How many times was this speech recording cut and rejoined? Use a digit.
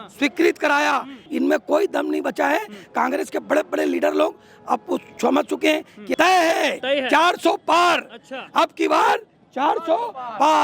2